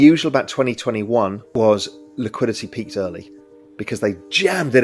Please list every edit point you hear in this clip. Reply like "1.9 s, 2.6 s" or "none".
1.4 s